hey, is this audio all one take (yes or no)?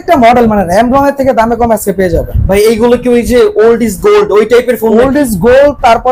yes